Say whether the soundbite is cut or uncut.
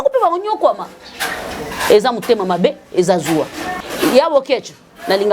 cut